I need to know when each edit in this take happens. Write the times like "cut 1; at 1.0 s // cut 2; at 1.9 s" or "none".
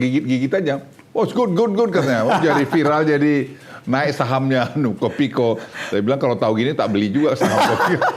none